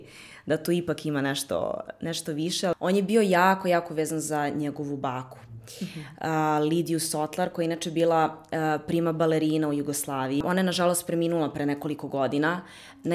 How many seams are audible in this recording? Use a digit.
2